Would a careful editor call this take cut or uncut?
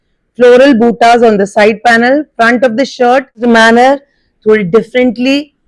cut